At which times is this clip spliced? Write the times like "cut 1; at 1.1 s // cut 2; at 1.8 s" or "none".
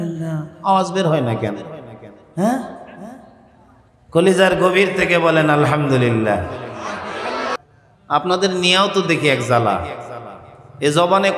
cut 1; at 7.5 s